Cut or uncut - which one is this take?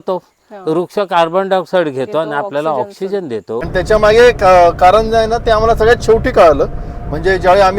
cut